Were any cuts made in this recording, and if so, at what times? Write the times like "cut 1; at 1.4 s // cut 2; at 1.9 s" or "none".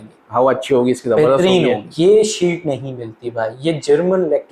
cut 1; at 1.9 s